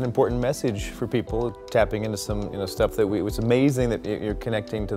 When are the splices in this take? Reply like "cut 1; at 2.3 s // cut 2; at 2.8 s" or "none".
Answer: cut 1; at 1.5 s